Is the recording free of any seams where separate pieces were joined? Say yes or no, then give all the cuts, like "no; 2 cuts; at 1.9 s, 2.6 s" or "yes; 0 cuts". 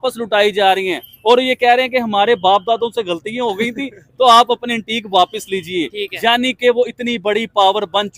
yes; 0 cuts